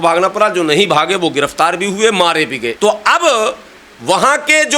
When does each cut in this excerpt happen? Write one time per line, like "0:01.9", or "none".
0:02.7